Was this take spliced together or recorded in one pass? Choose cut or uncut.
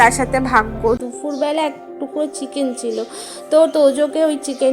cut